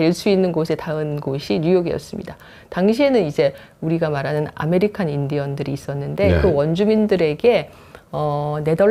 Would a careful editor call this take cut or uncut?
uncut